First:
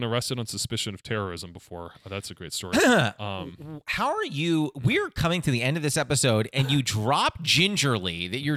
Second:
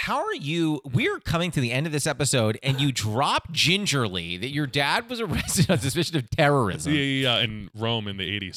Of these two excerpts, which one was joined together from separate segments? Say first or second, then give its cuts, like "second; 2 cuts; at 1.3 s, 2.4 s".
second; 1 cut; at 7.5 s